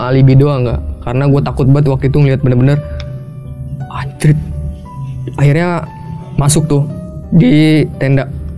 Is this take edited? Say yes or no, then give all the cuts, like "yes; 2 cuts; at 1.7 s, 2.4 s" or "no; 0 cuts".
no; 0 cuts